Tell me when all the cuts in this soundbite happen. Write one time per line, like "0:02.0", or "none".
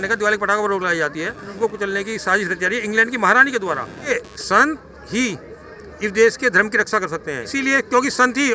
0:01.5
0:04.1
0:07.4